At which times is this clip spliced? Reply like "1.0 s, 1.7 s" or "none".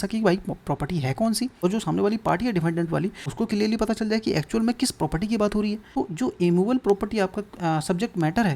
1.6 s, 3.2 s, 5.8 s